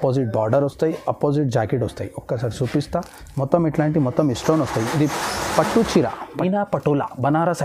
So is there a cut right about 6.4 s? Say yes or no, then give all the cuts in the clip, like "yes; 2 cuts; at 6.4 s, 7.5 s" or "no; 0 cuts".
yes; 1 cut; at 6.4 s